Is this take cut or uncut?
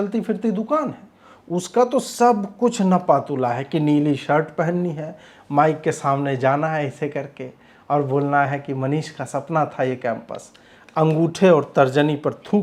uncut